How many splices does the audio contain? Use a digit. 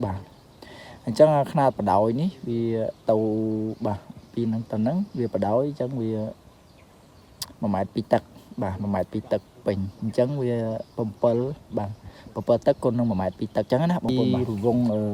1